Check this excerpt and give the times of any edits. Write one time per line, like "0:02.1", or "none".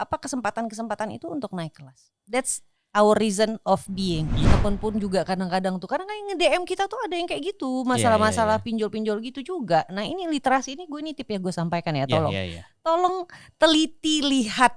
0:04.4

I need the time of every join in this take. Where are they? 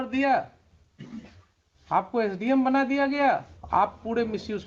0:03.5

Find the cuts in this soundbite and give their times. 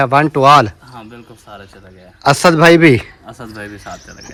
none

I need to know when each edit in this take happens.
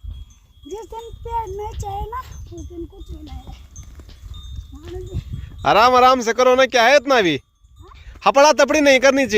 none

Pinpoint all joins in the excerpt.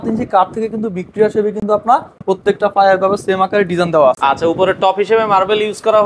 none

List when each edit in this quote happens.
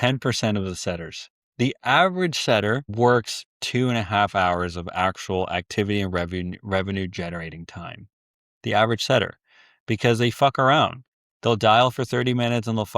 0:02.9

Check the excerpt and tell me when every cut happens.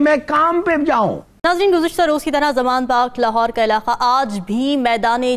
0:01.4

